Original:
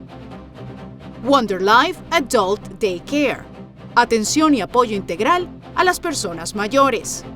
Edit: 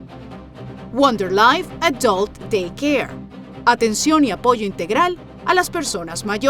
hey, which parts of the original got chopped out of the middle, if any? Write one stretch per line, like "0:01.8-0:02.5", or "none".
0:00.9-0:01.2